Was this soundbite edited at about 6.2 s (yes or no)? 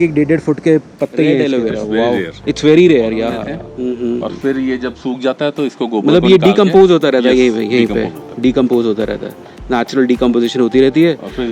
no